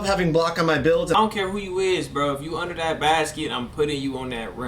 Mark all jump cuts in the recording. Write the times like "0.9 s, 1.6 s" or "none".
1.2 s